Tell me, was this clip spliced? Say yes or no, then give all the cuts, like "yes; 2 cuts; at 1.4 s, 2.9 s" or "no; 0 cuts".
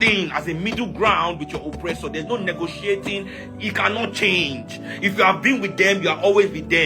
no; 0 cuts